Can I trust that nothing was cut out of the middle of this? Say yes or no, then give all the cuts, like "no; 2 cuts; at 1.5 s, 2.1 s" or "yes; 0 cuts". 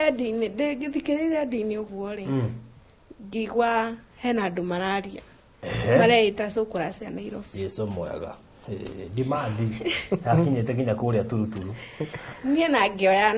yes; 0 cuts